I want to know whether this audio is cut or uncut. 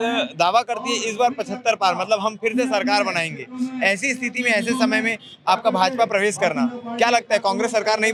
uncut